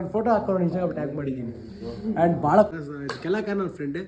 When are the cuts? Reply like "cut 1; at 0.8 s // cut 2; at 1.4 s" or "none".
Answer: cut 1; at 2.7 s